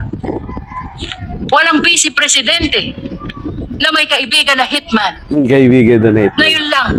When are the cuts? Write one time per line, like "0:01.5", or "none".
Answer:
none